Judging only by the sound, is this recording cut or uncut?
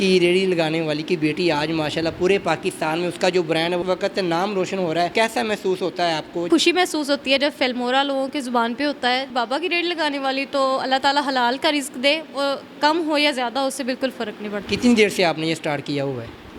cut